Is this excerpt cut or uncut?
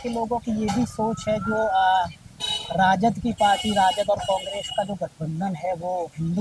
uncut